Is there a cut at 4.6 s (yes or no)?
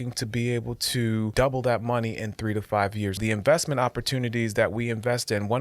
no